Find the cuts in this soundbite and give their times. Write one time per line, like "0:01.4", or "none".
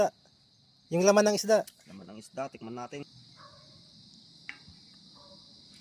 0:03.1